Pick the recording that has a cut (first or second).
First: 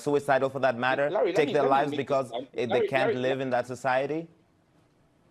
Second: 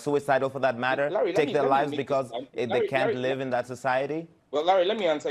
second